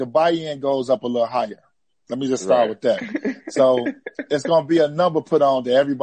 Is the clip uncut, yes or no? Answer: yes